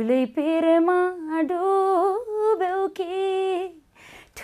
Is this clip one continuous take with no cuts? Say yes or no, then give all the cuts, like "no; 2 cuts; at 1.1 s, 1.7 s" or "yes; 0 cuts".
yes; 0 cuts